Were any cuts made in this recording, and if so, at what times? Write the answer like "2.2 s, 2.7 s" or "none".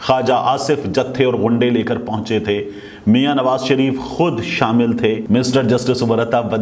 5.2 s